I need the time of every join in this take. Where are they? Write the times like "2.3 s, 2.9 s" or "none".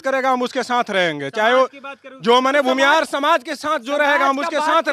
none